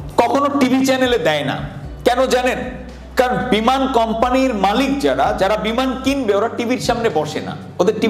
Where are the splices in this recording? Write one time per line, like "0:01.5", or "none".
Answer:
none

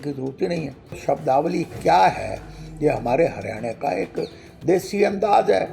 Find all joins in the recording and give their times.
0:01.0

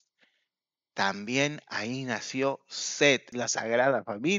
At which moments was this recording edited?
0:03.4

